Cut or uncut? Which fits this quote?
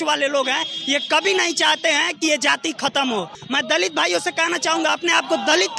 cut